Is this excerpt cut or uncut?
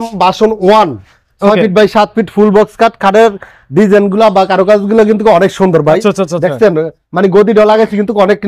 uncut